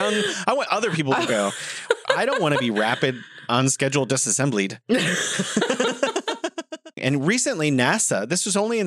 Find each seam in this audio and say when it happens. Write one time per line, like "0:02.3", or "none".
0:07.0